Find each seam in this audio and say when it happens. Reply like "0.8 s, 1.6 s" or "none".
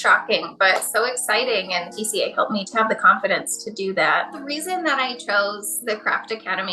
2.5 s, 4.4 s